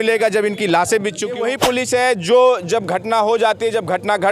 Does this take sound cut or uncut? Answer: cut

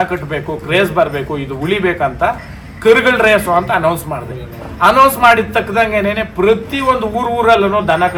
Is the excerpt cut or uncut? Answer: uncut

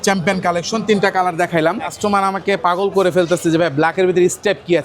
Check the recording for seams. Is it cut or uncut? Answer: cut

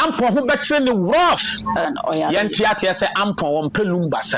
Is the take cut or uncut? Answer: cut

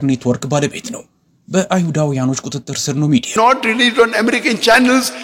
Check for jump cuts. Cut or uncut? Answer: cut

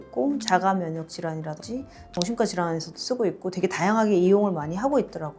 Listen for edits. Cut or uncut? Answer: cut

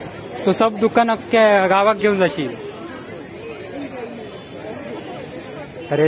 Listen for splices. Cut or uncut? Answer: uncut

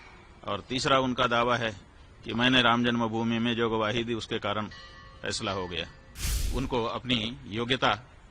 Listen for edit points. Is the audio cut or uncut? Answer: cut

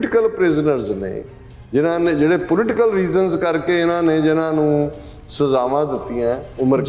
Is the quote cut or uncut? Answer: uncut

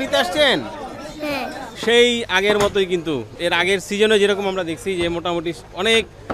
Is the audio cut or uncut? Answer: cut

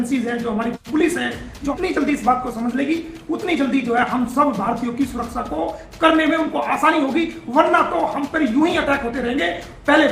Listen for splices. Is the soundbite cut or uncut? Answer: cut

